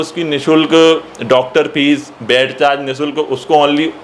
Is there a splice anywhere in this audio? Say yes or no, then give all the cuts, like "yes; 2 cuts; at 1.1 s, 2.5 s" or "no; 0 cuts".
no; 0 cuts